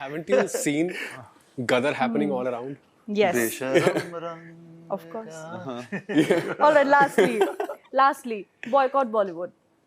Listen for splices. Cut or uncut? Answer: uncut